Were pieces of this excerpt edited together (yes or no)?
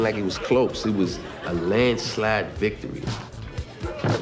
no